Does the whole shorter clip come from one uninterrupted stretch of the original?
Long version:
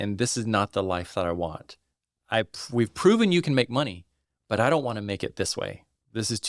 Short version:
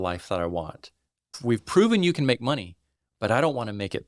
no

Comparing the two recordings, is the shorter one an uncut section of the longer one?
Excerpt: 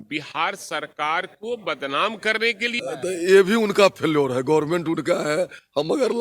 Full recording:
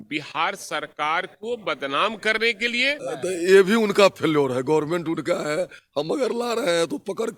no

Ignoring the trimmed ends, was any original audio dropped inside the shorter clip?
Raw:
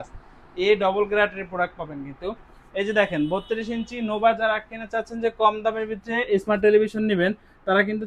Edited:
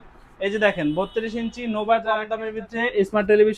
yes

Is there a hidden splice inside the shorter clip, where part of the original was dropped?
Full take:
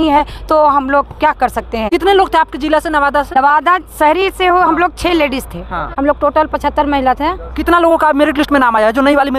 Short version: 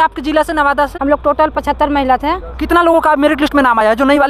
yes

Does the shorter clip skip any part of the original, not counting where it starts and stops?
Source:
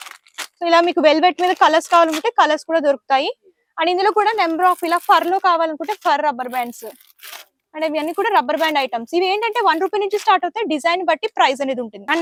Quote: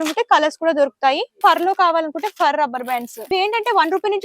yes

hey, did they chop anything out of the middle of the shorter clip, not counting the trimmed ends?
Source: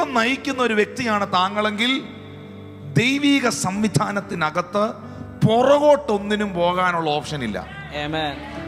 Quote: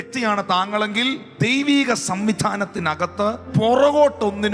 yes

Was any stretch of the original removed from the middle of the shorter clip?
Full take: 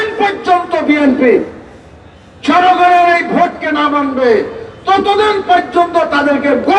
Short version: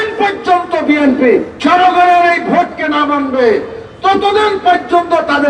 yes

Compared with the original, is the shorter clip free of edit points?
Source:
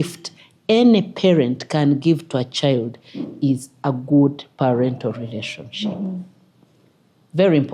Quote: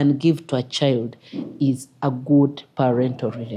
yes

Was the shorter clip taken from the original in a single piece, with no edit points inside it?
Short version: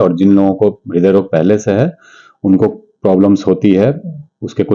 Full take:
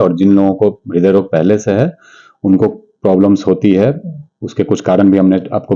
yes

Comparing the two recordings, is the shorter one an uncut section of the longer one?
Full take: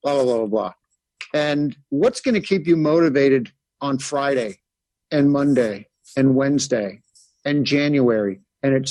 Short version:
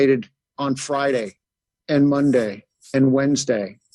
yes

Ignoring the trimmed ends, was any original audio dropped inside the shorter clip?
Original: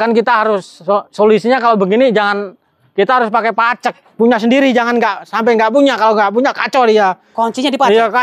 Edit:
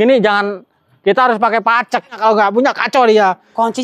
yes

